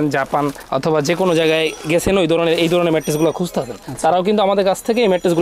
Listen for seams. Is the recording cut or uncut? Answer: uncut